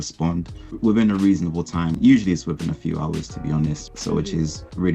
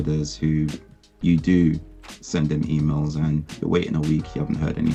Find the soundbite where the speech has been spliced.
first; 3 cuts; at 0.8 s, 1.9 s, 3.8 s

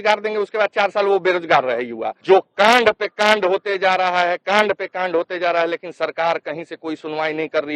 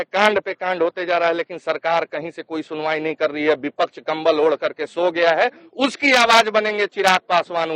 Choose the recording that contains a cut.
first; 1 cut; at 2.2 s

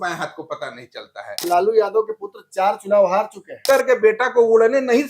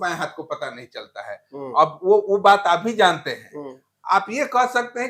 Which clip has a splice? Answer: first; 2 cuts; at 1.4 s, 3.5 s

